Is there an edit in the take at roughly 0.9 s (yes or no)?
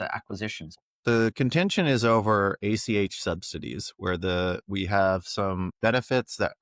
yes